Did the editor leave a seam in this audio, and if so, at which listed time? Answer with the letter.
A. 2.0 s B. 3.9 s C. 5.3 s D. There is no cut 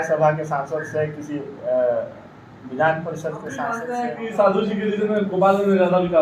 B